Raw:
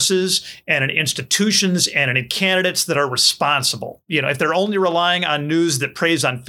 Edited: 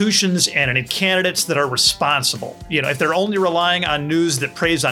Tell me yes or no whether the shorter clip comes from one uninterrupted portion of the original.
yes